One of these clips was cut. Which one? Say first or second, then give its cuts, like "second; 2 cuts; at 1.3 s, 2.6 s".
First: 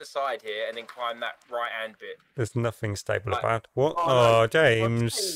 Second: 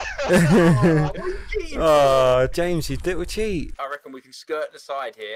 second; 1 cut; at 3.7 s